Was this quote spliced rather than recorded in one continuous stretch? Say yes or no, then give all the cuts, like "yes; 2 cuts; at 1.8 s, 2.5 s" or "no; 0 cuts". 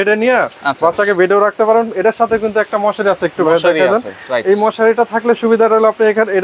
no; 0 cuts